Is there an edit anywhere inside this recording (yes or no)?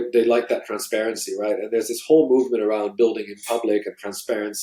no